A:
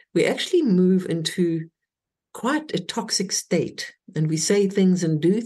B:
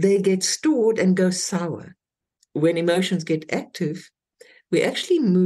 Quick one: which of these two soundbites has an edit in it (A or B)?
B